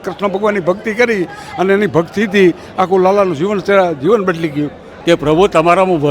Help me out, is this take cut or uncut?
cut